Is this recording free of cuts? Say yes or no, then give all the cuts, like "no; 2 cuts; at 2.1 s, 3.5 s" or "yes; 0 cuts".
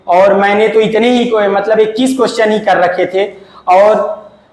yes; 0 cuts